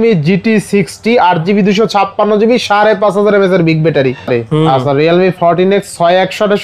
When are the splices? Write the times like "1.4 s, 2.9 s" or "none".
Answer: 4.3 s